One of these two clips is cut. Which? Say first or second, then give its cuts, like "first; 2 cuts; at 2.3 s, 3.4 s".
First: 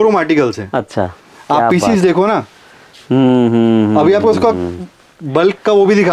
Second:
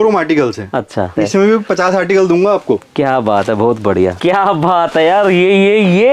second; 2 cuts; at 1.1 s, 4.2 s